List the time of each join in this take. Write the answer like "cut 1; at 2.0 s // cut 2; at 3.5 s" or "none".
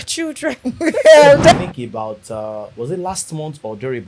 cut 1; at 1.5 s